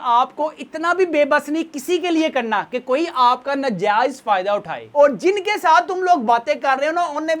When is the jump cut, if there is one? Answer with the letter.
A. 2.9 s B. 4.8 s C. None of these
B